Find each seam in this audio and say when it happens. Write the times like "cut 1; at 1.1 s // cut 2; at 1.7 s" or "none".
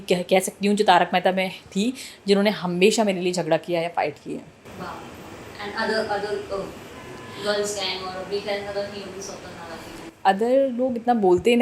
none